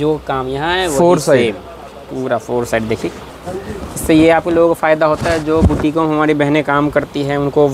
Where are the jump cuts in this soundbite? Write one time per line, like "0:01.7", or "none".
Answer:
0:03.2